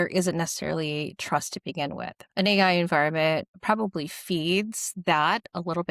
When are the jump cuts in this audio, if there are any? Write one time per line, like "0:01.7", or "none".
0:02.1
0:03.5